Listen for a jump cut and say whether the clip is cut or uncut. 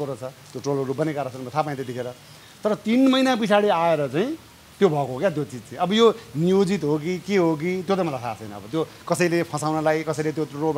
uncut